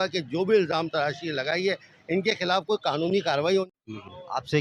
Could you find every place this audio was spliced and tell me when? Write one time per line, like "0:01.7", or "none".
0:03.7